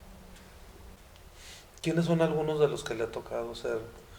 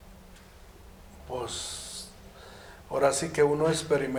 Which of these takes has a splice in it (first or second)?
first